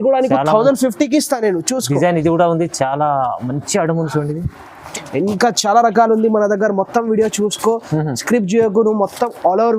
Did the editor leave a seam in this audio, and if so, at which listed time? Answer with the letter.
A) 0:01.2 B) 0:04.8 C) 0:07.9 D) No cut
B